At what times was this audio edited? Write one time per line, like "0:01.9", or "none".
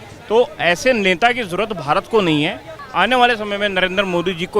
0:02.8